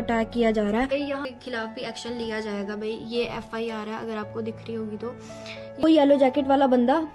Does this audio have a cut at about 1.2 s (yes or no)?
yes